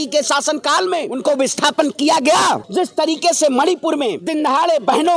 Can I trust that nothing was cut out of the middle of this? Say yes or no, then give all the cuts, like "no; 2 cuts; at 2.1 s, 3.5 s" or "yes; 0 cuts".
no; 3 cuts; at 1.1 s, 2.7 s, 4.2 s